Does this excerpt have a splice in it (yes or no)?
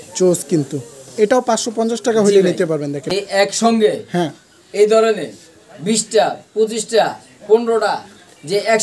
yes